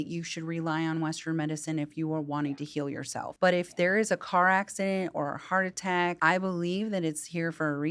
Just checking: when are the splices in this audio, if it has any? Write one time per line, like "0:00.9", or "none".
0:03.3
0:06.2